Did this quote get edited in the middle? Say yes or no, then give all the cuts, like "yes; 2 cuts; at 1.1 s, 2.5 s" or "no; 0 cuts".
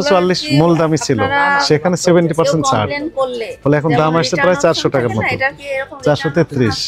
no; 0 cuts